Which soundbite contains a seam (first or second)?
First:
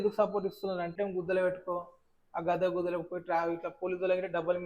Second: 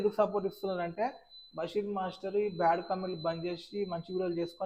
first